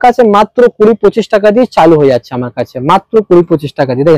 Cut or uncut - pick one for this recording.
uncut